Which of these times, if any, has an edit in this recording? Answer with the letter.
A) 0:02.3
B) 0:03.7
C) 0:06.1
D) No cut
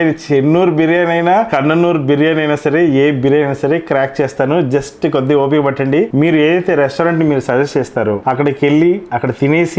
C